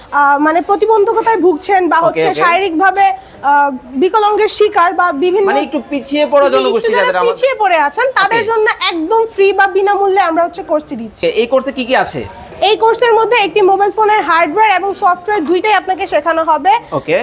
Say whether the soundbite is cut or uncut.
cut